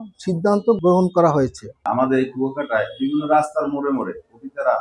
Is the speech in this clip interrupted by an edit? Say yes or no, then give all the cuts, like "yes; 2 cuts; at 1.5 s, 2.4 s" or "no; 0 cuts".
yes; 2 cuts; at 0.8 s, 1.9 s